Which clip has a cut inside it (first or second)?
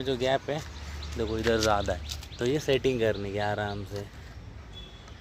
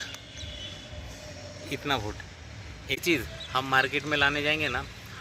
second